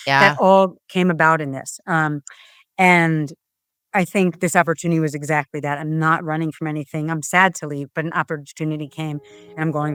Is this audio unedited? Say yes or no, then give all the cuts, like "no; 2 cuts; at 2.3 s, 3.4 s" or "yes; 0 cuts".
yes; 0 cuts